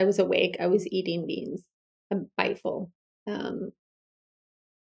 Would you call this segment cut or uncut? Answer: uncut